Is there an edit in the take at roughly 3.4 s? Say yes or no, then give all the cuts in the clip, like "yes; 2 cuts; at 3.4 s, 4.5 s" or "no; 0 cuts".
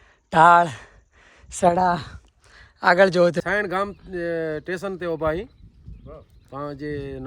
yes; 1 cut; at 3.4 s